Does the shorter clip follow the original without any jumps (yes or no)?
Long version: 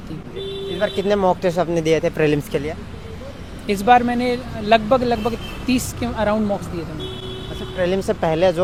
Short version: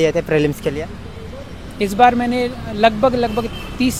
yes